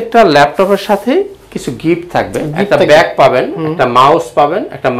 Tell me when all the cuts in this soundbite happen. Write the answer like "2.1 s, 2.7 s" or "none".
none